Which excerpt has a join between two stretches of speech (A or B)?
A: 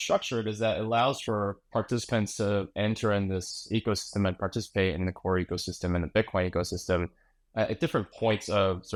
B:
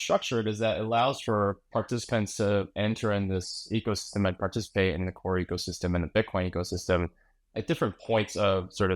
B